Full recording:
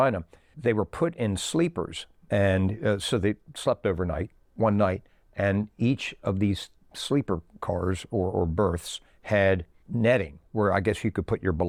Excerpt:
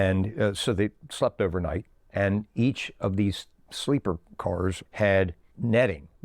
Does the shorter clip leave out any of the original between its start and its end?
yes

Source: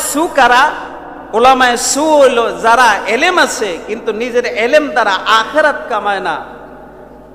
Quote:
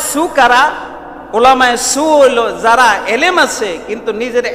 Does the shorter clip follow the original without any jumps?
yes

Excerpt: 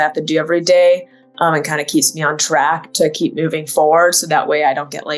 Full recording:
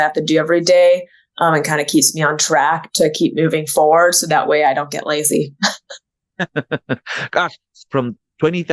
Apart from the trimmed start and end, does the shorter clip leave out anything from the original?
no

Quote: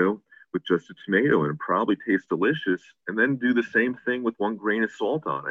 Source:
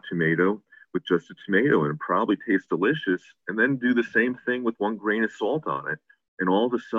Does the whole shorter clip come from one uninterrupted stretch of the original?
yes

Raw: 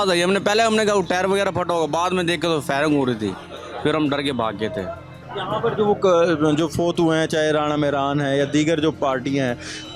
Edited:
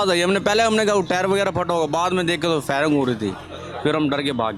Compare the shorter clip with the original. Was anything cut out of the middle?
no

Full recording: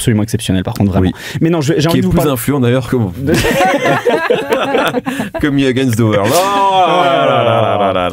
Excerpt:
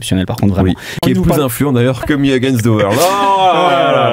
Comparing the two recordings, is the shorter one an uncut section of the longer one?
no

